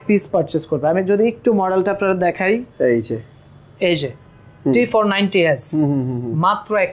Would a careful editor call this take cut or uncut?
uncut